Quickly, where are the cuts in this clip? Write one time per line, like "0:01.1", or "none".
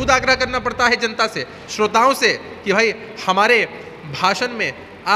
none